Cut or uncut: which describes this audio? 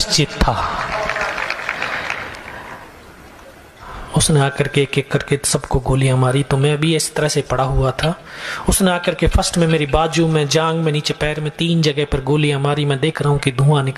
cut